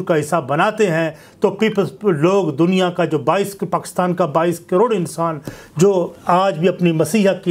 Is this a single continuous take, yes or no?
yes